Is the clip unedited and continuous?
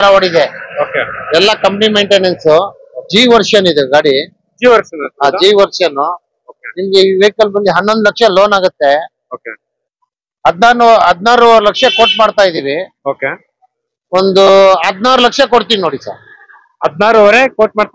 yes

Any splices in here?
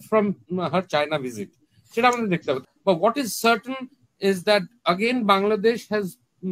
yes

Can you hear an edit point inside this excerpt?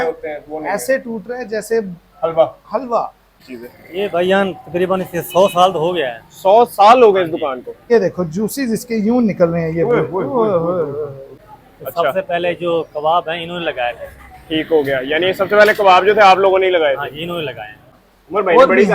yes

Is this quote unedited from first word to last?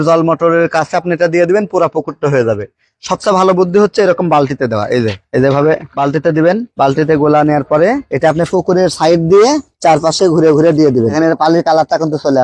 no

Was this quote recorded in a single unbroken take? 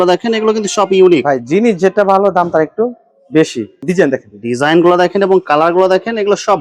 no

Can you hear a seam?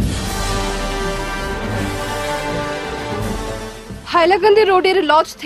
no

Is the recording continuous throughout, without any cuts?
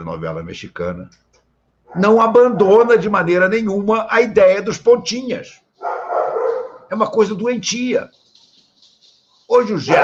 yes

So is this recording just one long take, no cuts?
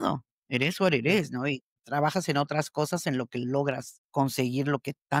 no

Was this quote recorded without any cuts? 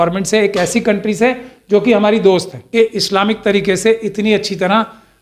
no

